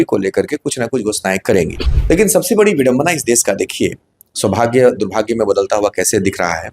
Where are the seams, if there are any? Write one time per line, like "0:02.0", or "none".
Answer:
0:01.9